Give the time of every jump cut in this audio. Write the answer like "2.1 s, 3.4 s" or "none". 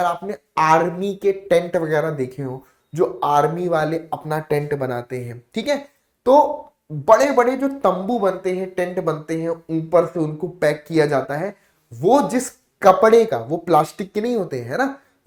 none